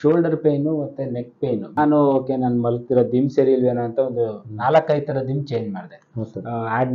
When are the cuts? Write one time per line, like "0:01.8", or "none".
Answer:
0:01.8